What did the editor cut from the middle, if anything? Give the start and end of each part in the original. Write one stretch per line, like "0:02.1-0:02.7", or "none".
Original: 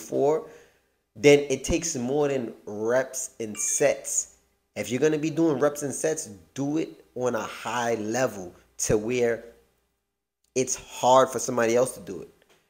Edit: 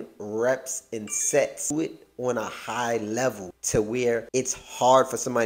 0:04.2-0:06.7
0:08.5-0:08.7
0:09.4-0:10.5